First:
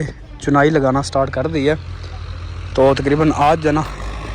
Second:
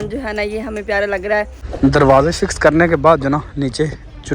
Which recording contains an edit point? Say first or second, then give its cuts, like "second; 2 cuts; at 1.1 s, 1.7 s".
second; 1 cut; at 1.6 s